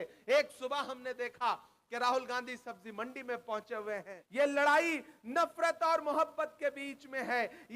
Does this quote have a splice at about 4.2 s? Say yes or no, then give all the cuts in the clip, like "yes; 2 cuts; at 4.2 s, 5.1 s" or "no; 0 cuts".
yes; 1 cut; at 4.2 s